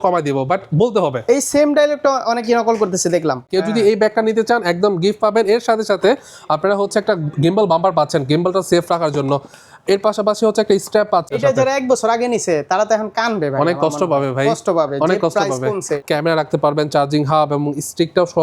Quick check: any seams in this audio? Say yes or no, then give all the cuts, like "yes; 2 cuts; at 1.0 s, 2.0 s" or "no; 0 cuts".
yes; 3 cuts; at 3.5 s, 11.3 s, 15.9 s